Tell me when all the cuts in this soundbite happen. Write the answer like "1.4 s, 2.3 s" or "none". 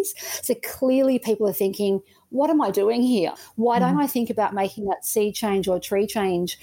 3.3 s